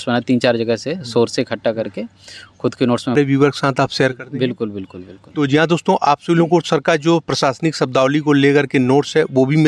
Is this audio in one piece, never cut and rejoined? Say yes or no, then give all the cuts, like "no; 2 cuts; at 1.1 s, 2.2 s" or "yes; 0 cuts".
no; 1 cut; at 3.1 s